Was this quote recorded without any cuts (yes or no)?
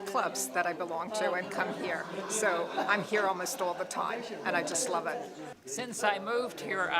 no